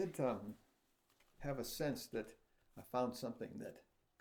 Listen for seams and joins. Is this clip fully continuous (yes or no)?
yes